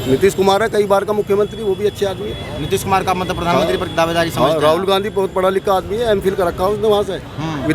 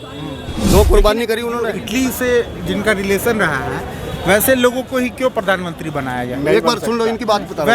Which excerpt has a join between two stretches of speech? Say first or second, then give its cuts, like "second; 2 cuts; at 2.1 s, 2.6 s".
second; 1 cut; at 1.8 s